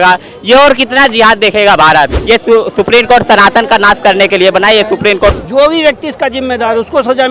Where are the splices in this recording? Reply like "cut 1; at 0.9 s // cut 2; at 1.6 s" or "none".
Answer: cut 1; at 2.2 s // cut 2; at 5.3 s